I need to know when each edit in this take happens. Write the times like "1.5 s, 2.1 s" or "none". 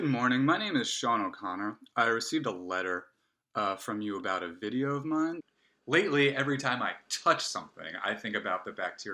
5.4 s